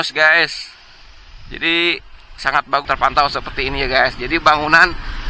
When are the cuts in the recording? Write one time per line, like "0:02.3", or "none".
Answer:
0:02.9